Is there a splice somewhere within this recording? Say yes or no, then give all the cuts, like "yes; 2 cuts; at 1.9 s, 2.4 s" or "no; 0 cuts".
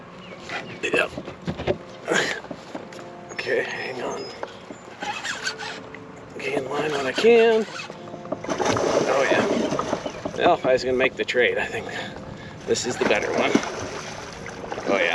no; 0 cuts